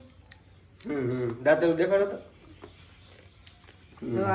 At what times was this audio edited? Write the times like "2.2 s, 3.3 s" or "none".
none